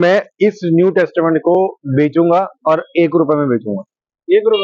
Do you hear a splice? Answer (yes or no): no